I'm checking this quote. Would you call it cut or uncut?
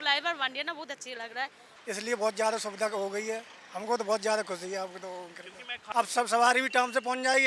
cut